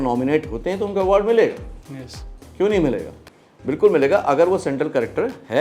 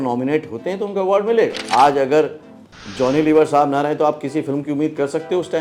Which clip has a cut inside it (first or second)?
second